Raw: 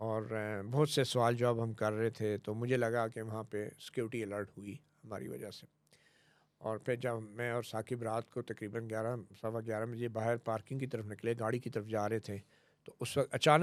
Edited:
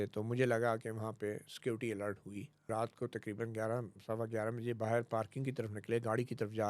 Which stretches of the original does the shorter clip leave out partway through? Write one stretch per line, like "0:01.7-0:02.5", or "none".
0:05.0-0:08.0

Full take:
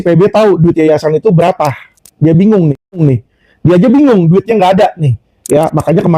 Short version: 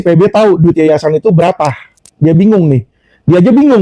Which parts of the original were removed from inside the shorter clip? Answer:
0:02.8-0:03.2

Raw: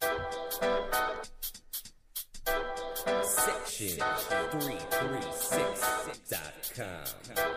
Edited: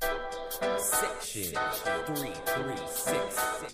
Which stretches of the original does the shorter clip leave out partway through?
0:01.0-0:03.4

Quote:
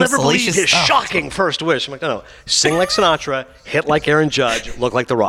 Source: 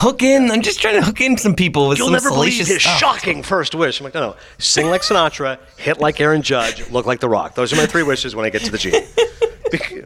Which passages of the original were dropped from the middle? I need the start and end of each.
none

